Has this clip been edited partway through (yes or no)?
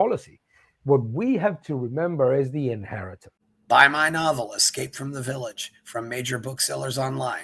yes